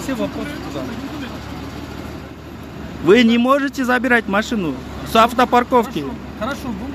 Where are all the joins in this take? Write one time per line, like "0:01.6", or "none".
0:02.8